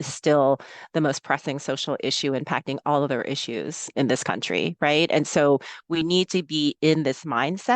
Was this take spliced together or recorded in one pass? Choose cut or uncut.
uncut